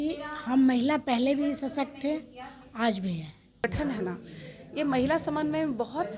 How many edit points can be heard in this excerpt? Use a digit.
1